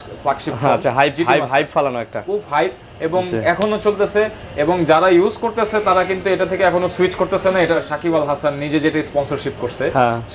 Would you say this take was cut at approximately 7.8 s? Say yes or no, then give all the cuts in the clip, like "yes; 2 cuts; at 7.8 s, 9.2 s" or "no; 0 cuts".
yes; 1 cut; at 7.8 s